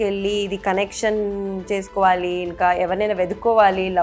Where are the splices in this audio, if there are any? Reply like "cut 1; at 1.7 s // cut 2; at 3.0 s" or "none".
none